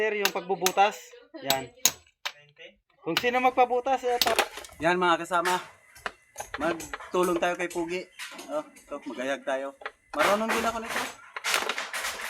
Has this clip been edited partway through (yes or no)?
yes